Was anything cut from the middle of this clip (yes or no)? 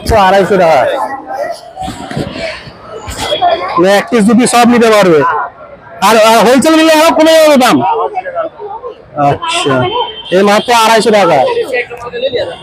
yes